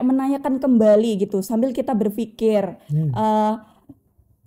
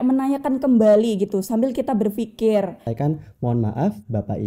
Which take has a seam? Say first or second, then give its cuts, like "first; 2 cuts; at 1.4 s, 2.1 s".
second; 1 cut; at 2.9 s